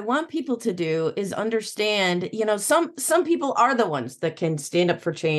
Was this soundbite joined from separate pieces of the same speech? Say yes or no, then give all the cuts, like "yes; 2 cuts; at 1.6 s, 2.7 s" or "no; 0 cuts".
no; 0 cuts